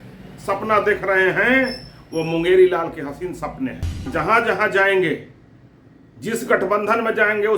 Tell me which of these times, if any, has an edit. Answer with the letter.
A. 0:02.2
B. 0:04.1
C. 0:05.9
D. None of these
B